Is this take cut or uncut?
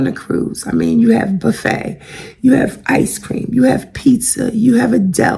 uncut